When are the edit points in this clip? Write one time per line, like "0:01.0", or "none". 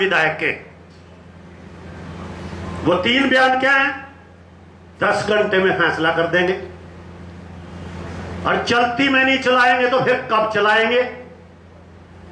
none